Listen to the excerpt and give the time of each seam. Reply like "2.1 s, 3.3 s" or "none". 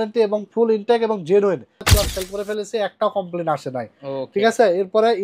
1.9 s